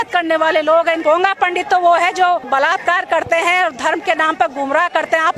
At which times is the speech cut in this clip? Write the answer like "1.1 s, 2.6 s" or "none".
1.0 s, 2.5 s